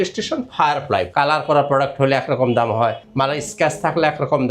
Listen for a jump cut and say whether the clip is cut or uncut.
cut